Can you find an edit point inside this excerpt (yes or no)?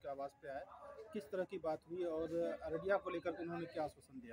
no